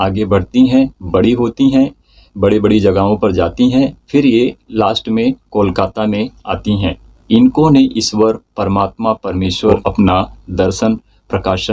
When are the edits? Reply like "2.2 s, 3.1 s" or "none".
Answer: 7.1 s, 9.7 s